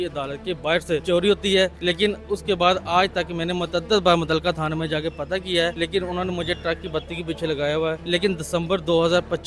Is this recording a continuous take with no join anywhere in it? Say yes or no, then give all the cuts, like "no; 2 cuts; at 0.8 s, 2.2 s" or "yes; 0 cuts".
no; 4 cuts; at 1.0 s, 1.8 s, 5.7 s, 8.0 s